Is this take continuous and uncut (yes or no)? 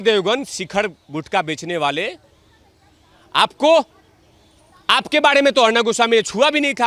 yes